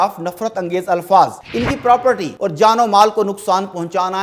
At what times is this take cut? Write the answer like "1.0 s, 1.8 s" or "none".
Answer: 1.5 s, 2.3 s